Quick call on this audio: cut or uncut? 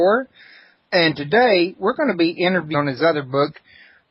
uncut